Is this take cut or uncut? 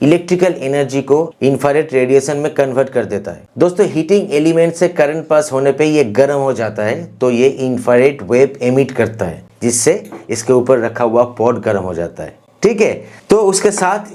uncut